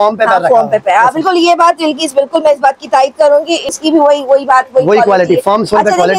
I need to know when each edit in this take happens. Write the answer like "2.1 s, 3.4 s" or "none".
3.7 s